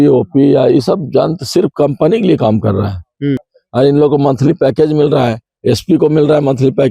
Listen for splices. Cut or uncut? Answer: cut